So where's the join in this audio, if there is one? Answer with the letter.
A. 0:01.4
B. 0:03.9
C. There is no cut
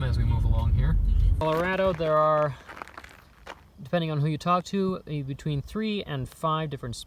A